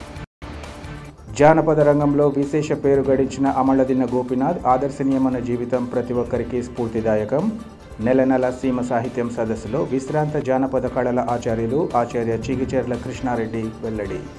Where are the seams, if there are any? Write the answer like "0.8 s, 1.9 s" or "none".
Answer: none